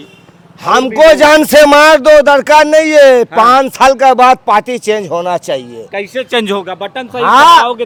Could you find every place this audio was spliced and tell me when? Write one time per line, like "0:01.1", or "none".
none